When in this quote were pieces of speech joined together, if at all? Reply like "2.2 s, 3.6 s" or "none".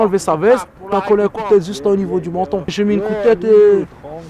0.9 s, 2.7 s